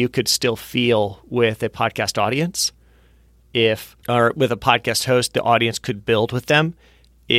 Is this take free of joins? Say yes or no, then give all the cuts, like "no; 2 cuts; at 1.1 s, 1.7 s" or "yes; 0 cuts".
yes; 0 cuts